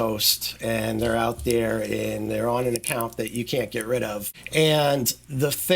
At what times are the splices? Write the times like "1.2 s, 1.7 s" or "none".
4.2 s

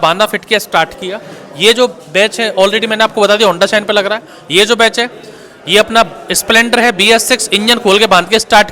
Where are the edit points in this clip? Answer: none

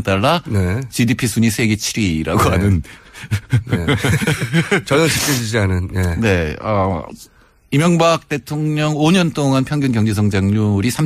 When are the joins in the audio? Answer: none

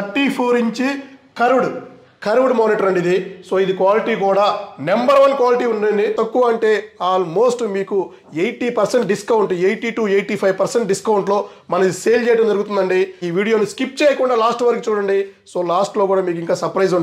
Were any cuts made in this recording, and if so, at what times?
6.1 s, 13.2 s

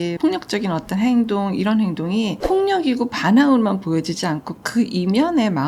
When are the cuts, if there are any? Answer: none

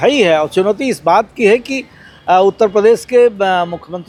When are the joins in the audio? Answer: none

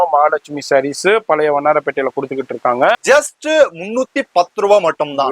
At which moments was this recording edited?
3.0 s

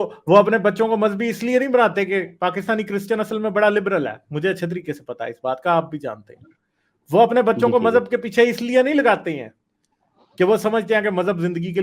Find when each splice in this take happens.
none

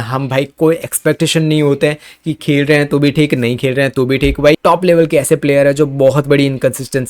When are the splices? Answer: 4.5 s

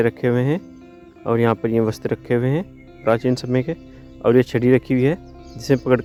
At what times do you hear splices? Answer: none

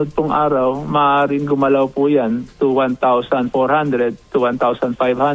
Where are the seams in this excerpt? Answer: none

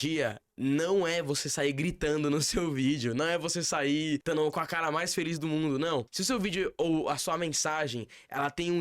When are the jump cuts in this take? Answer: 4.2 s, 6.1 s

